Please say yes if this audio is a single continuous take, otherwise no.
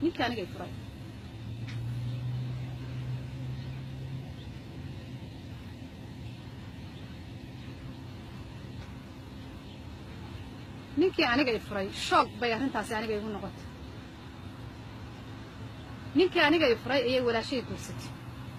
yes